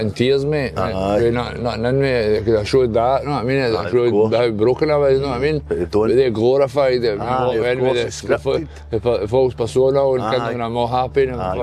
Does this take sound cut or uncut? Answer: uncut